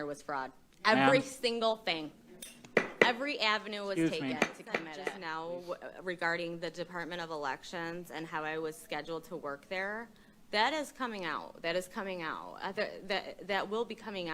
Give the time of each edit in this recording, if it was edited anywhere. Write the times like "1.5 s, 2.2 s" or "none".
5.2 s